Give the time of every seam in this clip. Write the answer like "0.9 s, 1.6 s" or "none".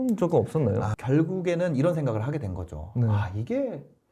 0.9 s